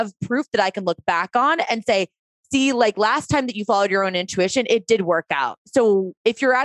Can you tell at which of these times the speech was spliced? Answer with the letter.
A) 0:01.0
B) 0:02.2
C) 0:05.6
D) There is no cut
C